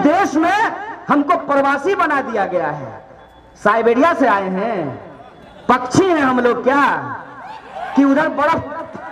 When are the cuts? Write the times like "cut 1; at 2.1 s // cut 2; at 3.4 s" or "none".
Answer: none